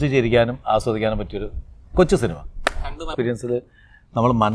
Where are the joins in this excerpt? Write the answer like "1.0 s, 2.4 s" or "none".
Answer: 3.1 s